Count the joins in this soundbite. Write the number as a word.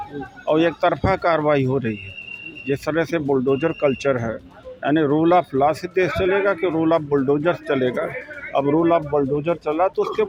zero